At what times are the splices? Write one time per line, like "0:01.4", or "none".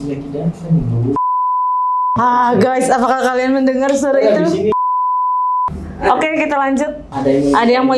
0:07.0